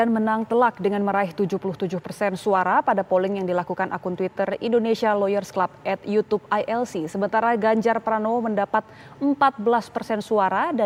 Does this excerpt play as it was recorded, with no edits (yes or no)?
yes